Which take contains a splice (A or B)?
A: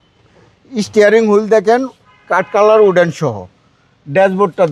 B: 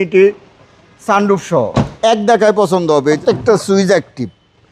B